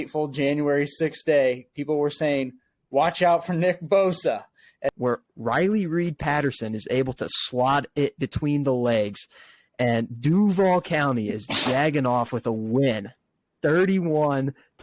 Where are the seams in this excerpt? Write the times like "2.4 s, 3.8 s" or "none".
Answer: 4.9 s